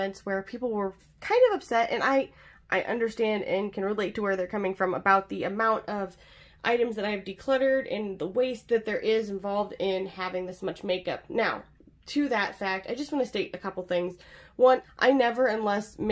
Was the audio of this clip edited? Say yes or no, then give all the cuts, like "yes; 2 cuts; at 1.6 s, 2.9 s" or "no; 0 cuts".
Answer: yes; 1 cut; at 14.9 s